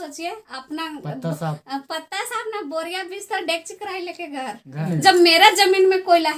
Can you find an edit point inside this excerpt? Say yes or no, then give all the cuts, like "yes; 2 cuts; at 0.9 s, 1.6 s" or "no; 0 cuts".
yes; 1 cut; at 4.8 s